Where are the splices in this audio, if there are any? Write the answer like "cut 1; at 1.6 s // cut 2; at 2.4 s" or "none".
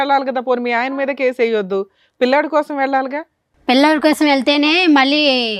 none